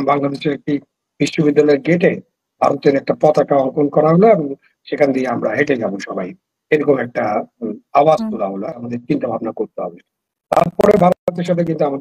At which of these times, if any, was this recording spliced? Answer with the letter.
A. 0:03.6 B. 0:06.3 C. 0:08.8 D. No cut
C